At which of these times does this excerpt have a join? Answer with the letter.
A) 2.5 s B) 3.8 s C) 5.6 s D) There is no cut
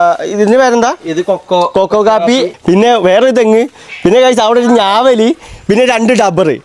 A